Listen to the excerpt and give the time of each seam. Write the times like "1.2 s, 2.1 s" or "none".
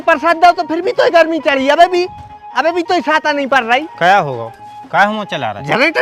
none